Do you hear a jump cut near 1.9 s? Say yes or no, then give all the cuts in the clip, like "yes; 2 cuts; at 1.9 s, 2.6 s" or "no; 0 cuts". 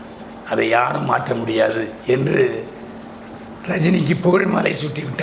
no; 0 cuts